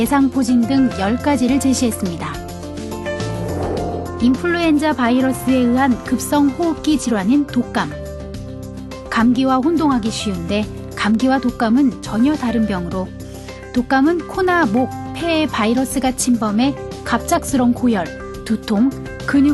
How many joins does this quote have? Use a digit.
1